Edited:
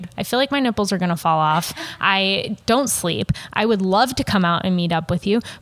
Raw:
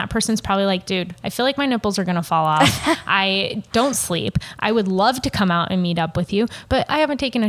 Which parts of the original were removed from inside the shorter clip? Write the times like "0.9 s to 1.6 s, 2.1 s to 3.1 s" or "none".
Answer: none